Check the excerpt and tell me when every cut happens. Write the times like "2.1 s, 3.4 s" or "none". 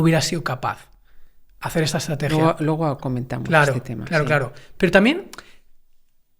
none